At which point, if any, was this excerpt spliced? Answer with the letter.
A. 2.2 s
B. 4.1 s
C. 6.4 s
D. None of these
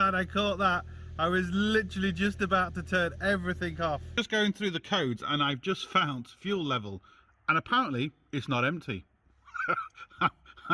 B